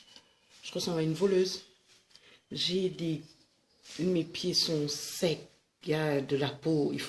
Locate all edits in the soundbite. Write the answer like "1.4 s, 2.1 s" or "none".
none